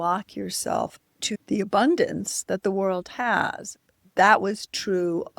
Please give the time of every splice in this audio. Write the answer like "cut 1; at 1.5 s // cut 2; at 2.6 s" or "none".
cut 1; at 1.4 s // cut 2; at 3.9 s